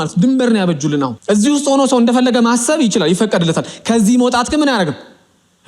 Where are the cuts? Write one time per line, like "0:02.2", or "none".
0:01.2

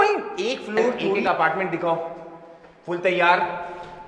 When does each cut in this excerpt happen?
0:01.2

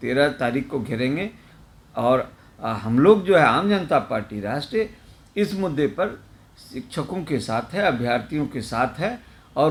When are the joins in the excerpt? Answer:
none

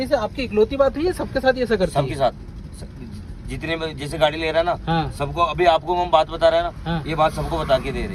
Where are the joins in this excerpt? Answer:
none

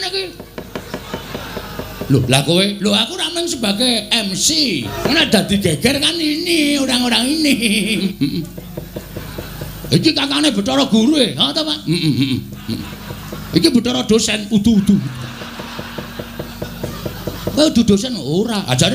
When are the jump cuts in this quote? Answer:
0:04.9
0:08.0

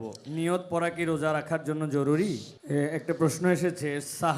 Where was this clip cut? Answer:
0:02.5

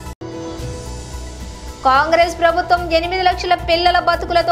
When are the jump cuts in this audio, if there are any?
none

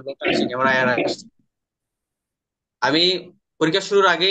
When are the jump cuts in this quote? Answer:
none

